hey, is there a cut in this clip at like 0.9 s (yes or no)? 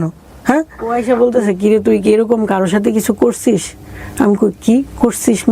yes